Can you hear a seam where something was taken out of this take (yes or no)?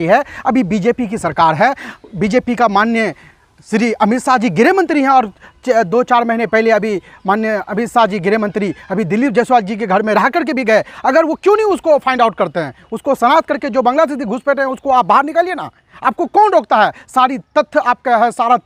no